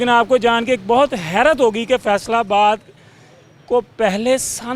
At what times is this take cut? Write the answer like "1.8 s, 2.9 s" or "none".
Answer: none

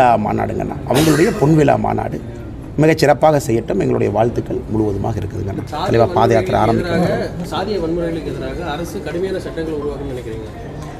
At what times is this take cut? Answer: 5.6 s

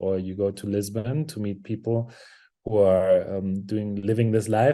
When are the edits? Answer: none

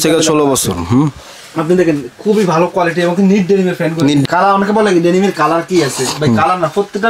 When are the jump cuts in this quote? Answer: 4.2 s

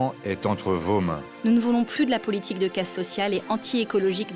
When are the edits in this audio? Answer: 1.3 s

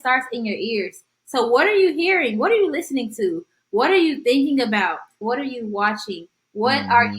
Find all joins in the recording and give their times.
5.2 s

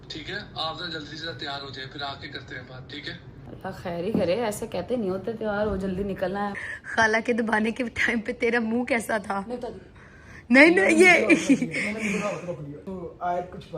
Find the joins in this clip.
3.3 s, 6.7 s, 12.8 s

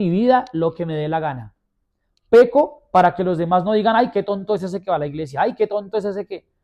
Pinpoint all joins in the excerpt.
none

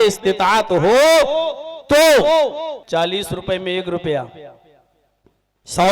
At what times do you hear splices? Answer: 2.8 s

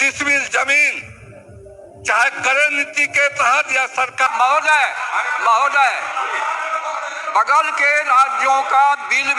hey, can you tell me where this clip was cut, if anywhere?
4.3 s

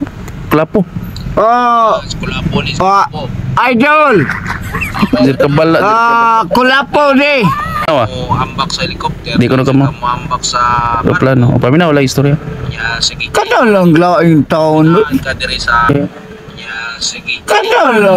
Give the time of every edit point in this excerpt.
7.9 s

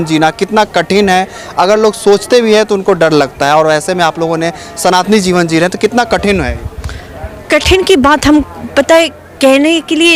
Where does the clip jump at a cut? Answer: none

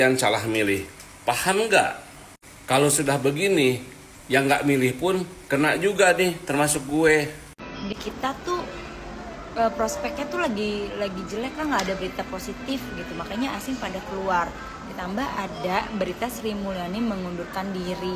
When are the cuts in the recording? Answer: 7.4 s

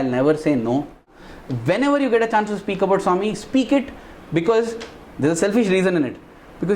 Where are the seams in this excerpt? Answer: 1.2 s

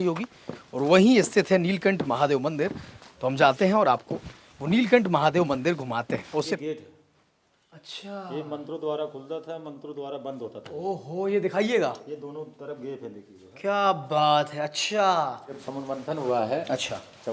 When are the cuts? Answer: 6.5 s, 15.6 s

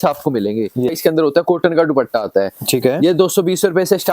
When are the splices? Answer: 1.0 s

